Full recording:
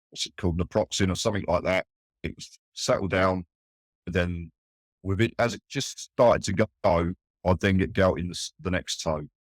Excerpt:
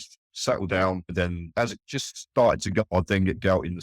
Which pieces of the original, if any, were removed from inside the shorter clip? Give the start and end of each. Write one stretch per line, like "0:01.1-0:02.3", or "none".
0:03.9-0:05.3
0:06.7-0:07.4

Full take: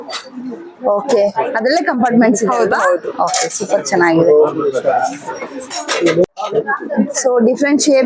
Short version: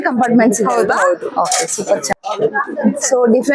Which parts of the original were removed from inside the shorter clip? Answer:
0:04.0-0:06.3

